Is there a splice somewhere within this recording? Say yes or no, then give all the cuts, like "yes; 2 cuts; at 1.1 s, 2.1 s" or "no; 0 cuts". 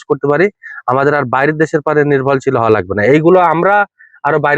no; 0 cuts